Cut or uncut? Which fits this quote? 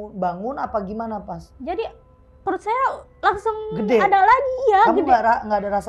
uncut